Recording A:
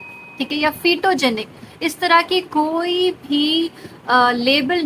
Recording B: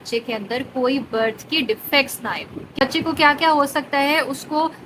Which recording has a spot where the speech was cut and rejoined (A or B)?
B